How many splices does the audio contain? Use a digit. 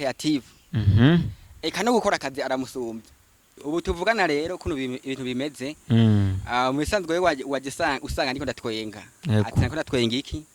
1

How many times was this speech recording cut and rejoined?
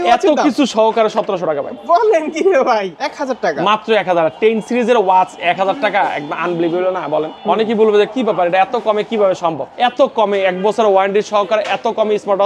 3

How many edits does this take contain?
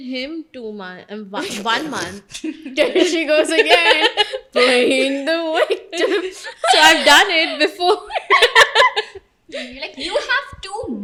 0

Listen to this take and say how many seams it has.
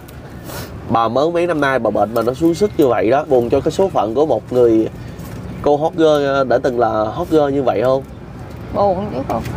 1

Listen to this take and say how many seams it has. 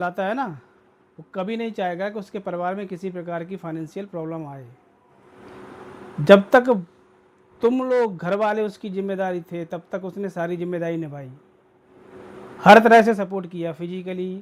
0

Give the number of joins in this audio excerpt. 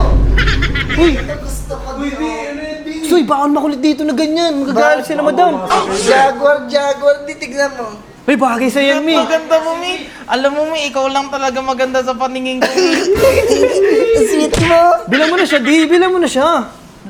0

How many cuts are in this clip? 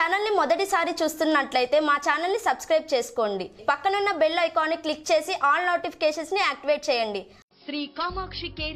2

